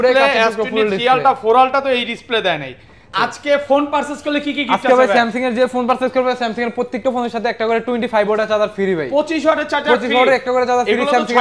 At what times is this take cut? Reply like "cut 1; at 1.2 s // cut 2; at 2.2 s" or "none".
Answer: cut 1; at 3.1 s